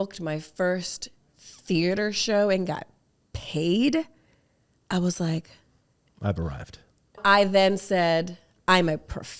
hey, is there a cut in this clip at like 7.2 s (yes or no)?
yes